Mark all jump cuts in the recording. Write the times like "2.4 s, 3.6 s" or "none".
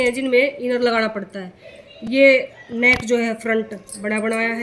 none